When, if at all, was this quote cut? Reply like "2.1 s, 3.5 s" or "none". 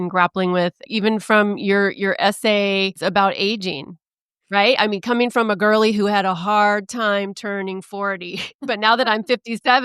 0.8 s, 3.0 s, 8.5 s